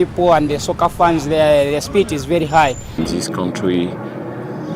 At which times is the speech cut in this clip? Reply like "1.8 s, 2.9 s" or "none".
3.0 s